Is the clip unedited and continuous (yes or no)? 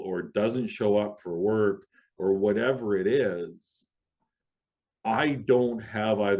yes